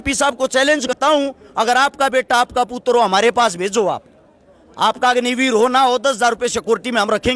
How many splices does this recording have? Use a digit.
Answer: 1